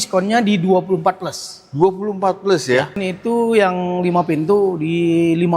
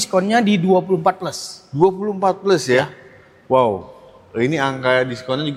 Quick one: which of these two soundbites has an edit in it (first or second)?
first